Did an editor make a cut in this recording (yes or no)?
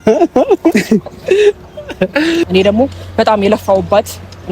yes